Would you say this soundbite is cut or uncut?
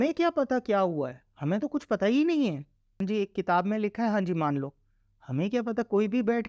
cut